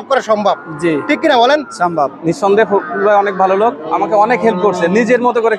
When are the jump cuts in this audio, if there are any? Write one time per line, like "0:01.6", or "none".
0:02.1